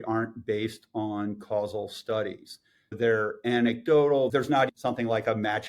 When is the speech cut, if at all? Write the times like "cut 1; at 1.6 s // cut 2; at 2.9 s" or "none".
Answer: cut 1; at 3.0 s // cut 2; at 4.5 s